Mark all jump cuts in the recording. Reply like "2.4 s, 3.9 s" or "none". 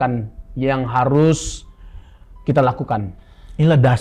none

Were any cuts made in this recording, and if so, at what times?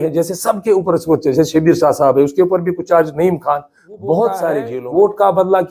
4.7 s

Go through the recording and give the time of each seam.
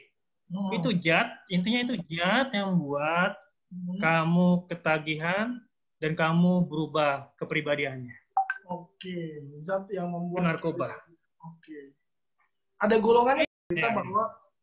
13.5 s

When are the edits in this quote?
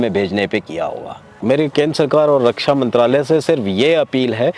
1.3 s

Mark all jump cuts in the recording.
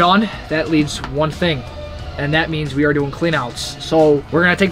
none

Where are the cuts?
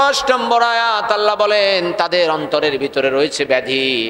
none

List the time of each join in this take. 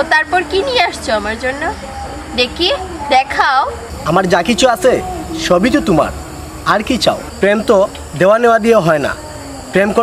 3.9 s, 7.3 s

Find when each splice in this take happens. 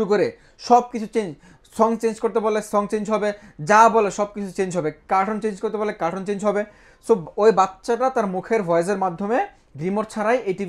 none

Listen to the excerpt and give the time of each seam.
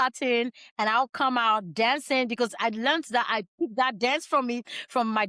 none

